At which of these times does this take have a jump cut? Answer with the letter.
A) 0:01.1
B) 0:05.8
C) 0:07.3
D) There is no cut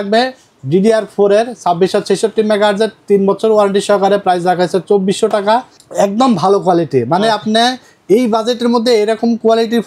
B